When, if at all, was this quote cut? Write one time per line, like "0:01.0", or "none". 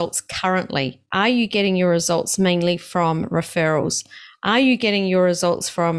0:01.0